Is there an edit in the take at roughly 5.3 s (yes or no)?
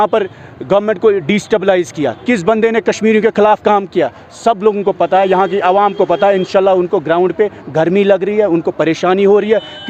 no